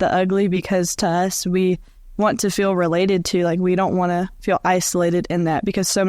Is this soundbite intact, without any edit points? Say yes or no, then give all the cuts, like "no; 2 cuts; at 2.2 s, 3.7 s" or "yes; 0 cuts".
yes; 0 cuts